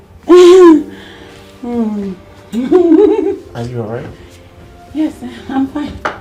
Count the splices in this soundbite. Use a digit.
0